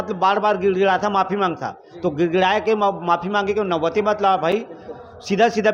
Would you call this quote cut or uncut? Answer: uncut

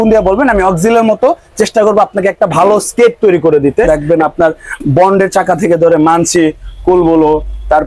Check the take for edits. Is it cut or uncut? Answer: cut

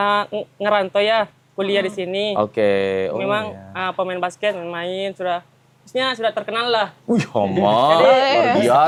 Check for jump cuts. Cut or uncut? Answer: uncut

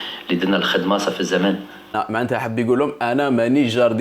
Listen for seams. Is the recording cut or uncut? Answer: cut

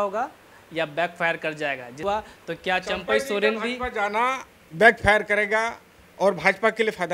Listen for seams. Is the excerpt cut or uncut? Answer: cut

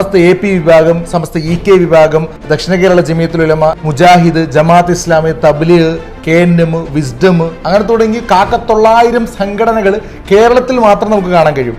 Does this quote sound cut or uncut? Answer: cut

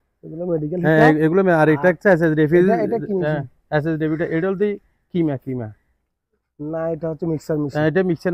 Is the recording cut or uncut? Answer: uncut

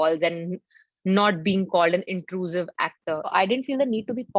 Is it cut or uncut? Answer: cut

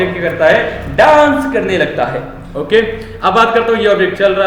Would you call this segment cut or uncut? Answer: uncut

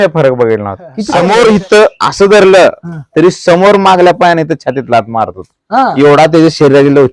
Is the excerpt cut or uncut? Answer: cut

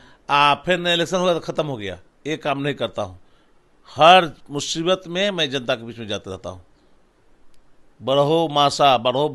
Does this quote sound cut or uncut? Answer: uncut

